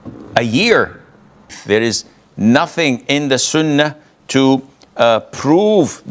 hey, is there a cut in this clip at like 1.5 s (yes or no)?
yes